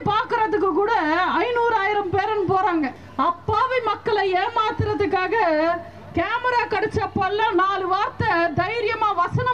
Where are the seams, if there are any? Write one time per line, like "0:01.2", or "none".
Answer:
0:03.0